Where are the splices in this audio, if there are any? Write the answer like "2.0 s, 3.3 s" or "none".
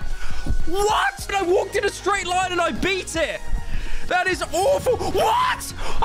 1.3 s